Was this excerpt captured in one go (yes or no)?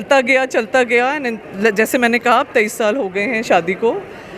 yes